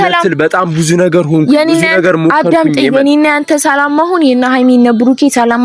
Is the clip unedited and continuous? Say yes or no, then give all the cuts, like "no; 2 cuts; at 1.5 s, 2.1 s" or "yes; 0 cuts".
yes; 0 cuts